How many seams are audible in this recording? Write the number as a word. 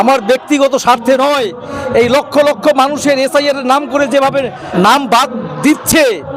one